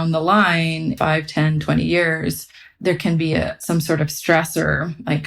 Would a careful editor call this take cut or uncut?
cut